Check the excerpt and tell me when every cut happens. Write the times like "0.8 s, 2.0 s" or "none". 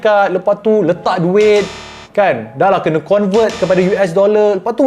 none